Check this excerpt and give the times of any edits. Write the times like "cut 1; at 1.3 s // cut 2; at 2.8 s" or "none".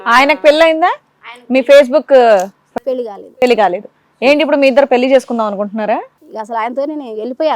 none

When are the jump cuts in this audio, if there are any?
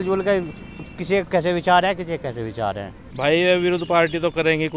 cut 1; at 2.9 s

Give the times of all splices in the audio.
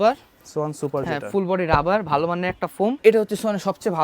cut 1; at 3.0 s

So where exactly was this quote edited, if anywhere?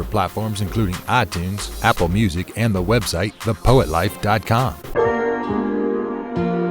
cut 1; at 4.8 s

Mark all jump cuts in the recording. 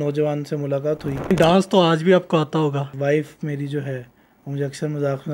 cut 1; at 1.3 s // cut 2; at 2.9 s

